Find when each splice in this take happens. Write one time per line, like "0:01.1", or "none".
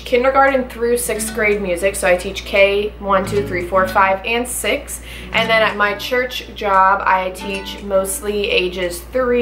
none